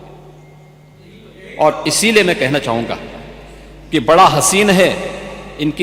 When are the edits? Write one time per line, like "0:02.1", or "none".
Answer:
none